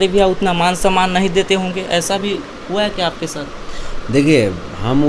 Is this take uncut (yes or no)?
yes